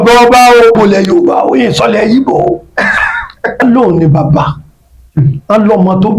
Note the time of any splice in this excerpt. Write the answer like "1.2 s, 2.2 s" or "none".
0.8 s, 3.6 s

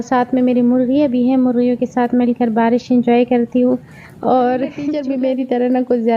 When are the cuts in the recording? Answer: 4.9 s

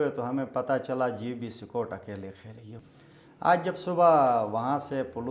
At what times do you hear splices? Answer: 2.8 s

